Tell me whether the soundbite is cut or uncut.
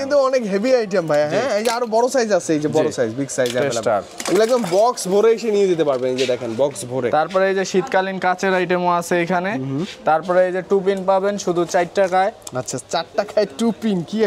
uncut